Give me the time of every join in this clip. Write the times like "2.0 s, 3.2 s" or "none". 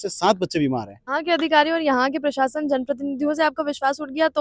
1.0 s